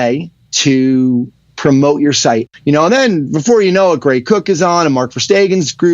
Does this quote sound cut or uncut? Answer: cut